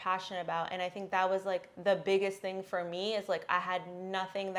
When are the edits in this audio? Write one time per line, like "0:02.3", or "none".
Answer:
none